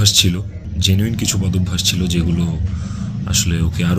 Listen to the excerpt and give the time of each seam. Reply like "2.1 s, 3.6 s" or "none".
none